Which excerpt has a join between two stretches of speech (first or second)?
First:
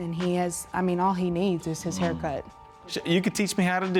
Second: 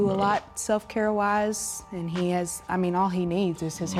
first